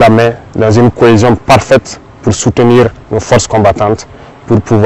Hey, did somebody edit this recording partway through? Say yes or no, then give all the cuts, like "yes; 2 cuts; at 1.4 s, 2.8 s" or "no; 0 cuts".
no; 0 cuts